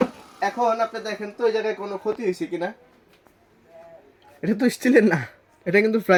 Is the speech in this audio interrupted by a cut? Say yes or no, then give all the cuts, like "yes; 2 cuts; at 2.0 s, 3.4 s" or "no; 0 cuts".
no; 0 cuts